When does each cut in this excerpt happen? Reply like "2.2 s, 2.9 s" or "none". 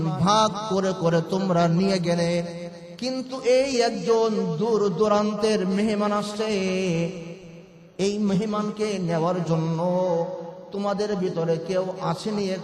none